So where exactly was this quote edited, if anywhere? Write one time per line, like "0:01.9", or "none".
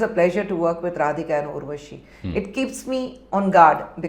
none